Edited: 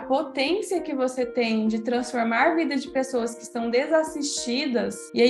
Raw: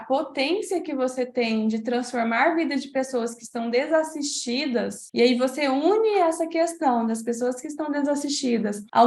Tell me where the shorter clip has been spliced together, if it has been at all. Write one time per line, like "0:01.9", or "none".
none